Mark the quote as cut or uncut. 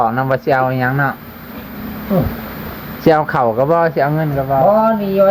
uncut